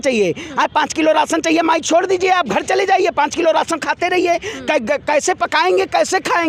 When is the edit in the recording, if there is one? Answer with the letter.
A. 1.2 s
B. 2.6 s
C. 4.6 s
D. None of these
D